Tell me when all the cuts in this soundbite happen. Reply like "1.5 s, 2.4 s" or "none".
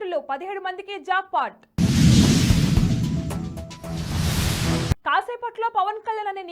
none